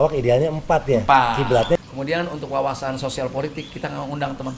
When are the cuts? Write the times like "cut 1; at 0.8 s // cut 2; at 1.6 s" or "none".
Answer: cut 1; at 1.8 s

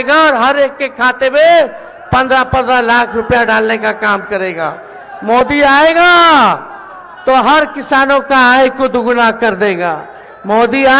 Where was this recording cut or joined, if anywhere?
none

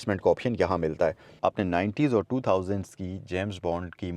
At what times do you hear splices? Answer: cut 1; at 1.3 s

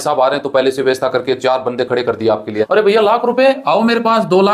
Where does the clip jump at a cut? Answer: cut 1; at 2.7 s

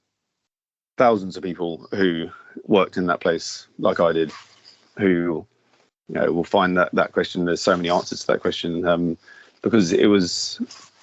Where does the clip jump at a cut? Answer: none

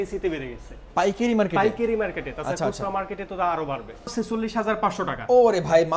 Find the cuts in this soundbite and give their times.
cut 1; at 4.1 s

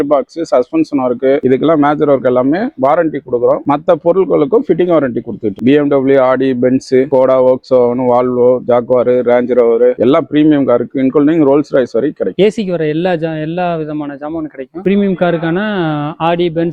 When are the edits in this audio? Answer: cut 1; at 12.3 s // cut 2; at 14.8 s

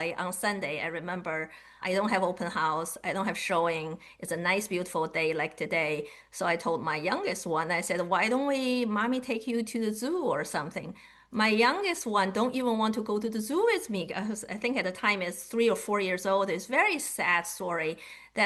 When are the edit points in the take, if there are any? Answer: none

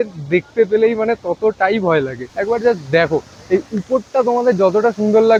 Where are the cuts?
none

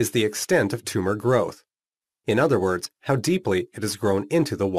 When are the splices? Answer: cut 1; at 2.3 s

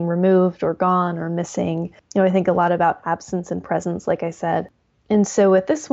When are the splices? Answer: cut 1; at 1.9 s

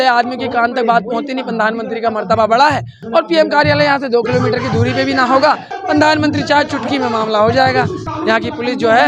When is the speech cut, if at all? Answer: cut 1; at 3.0 s // cut 2; at 5.7 s // cut 3; at 8.1 s

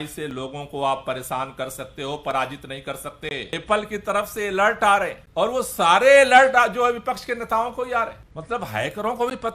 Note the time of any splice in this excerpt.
cut 1; at 3.5 s // cut 2; at 5.2 s // cut 3; at 8.3 s

